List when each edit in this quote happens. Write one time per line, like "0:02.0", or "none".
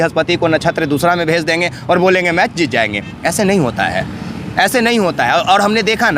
none

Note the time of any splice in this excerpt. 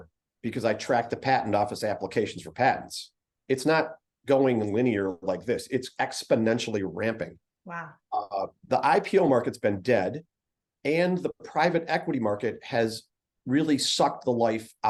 none

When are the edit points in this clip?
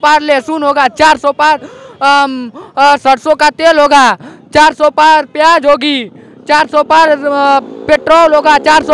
none

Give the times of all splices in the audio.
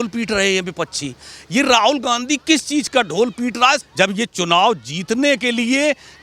0:03.8

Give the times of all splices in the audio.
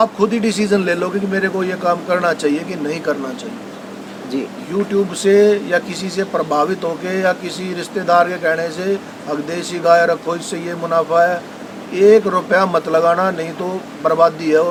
none

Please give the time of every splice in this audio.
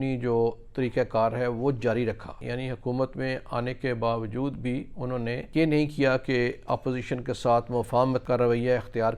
0:02.3
0:05.4
0:08.2

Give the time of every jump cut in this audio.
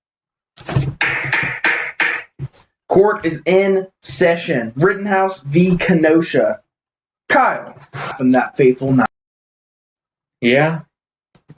none

